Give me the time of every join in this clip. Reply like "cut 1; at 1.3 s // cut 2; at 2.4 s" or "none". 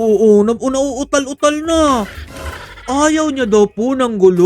none